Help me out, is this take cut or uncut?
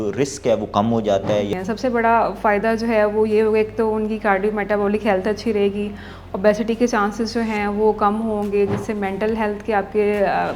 cut